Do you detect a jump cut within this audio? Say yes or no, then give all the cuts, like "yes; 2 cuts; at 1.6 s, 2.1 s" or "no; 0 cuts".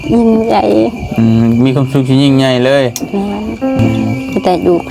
yes; 1 cut; at 3.8 s